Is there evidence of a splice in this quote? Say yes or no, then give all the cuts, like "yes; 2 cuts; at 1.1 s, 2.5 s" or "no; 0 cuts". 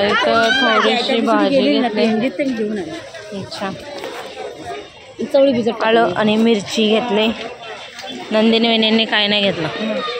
no; 0 cuts